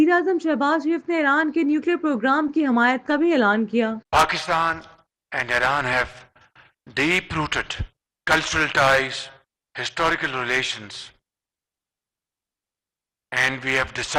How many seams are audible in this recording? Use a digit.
0